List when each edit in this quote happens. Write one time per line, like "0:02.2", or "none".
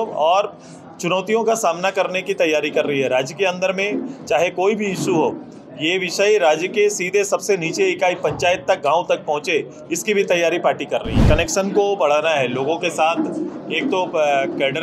0:11.2

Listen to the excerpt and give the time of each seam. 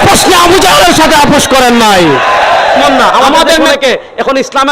0:03.6

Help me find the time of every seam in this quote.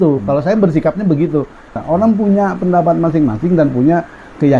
0:01.8

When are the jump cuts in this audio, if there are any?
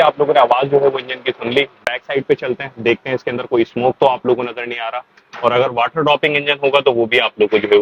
none

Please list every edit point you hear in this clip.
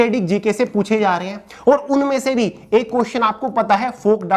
none

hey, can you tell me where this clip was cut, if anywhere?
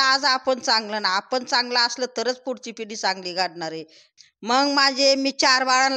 0:04.2

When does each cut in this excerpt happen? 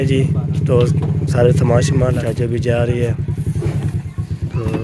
0:02.2

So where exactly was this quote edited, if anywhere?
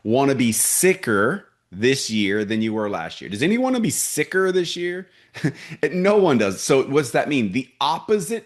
none

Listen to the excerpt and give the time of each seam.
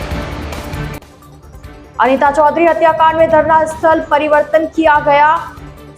0:00.9

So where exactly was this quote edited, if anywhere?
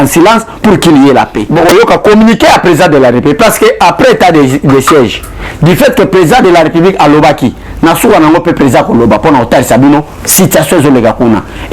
0:01.4

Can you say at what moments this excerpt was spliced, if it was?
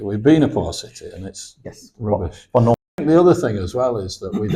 0:03.0

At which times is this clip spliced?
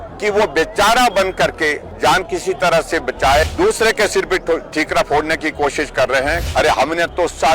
0:01.9
0:03.4
0:06.4

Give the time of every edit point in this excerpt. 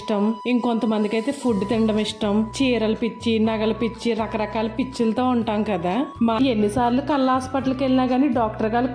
0:06.4

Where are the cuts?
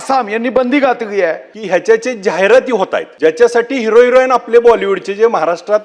0:01.5
0:03.0

